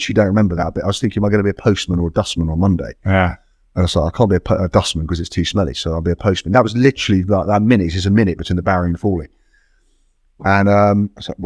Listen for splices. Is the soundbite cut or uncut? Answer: uncut